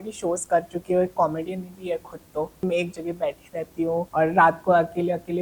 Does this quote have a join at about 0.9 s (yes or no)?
no